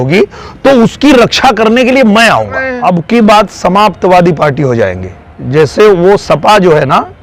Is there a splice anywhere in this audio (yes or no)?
yes